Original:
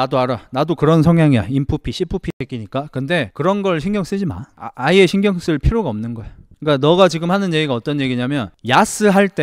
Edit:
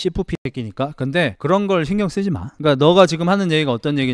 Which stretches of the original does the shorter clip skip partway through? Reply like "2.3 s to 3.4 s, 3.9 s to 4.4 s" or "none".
4.4 s to 6.5 s